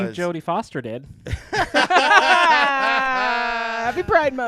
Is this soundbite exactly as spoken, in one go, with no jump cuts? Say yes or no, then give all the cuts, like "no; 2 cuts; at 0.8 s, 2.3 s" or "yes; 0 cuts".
yes; 0 cuts